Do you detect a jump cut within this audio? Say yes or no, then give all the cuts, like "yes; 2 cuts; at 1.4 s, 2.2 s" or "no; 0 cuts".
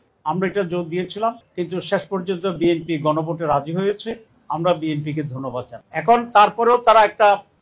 no; 0 cuts